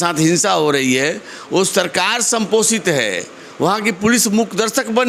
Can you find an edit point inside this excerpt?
no; 0 cuts

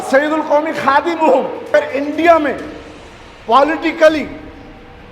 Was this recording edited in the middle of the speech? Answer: yes; 1 cut; at 1.7 s

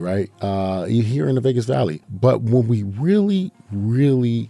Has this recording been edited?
yes; 1 cut; at 2.0 s

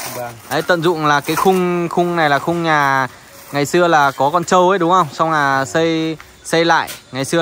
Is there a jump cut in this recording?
no; 0 cuts

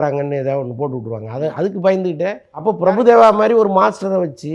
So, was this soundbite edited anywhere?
yes; 1 cut; at 2.5 s

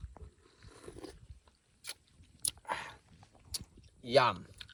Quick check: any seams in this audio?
no; 0 cuts

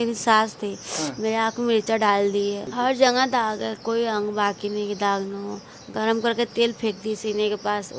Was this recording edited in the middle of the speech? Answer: yes; 1 cut; at 2.7 s

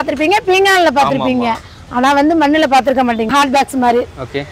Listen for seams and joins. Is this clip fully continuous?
no; 1 cut; at 3.3 s

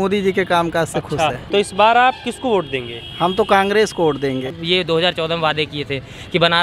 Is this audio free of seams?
no; 2 cuts; at 1.4 s, 4.5 s

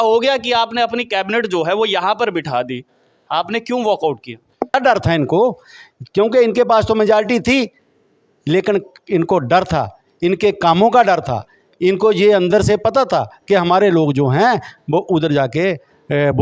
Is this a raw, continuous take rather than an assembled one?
no; 1 cut; at 4.7 s

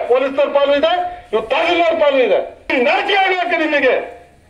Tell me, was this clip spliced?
yes; 1 cut; at 2.7 s

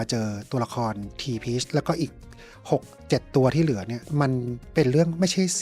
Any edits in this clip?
no; 0 cuts

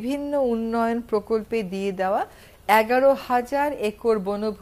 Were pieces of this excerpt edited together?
no; 0 cuts

